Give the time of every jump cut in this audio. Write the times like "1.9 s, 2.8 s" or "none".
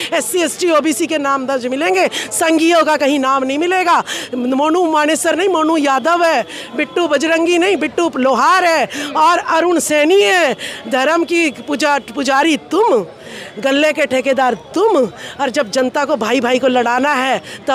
none